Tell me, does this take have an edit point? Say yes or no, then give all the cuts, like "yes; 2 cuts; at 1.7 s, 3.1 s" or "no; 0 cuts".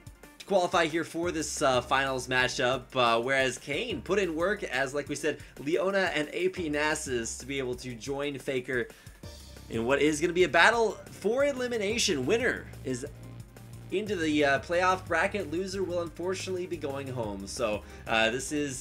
yes; 1 cut; at 1.5 s